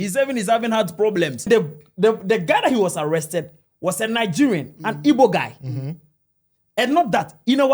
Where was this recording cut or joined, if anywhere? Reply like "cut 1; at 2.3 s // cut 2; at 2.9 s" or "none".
cut 1; at 1.5 s